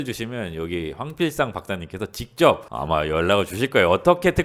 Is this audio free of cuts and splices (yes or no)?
yes